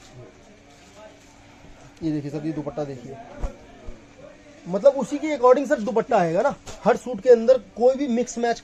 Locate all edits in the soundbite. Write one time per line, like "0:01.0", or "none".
none

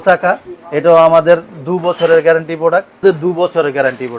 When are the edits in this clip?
0:03.0

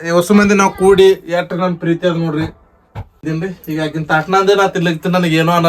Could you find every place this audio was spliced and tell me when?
0:03.2

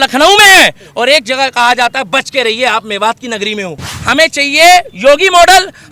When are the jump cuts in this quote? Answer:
0:03.9

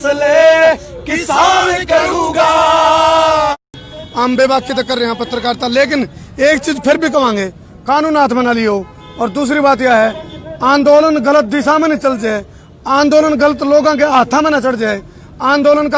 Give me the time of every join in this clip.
0:03.7

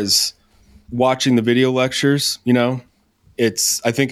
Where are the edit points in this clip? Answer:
none

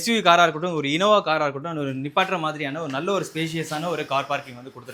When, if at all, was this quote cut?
none

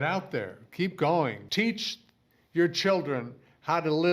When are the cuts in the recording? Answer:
0:01.4

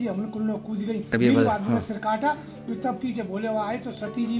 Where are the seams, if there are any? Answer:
0:01.1

